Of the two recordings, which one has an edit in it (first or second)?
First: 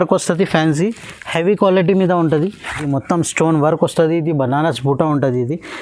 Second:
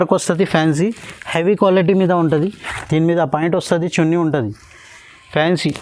first